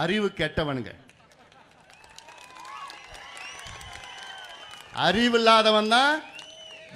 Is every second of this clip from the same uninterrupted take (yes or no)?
yes